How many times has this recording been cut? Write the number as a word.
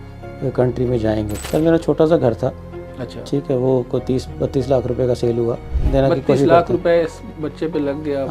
two